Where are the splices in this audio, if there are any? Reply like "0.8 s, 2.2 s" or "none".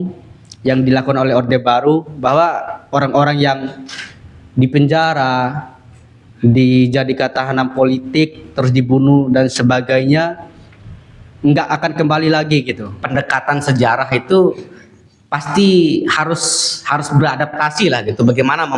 13.0 s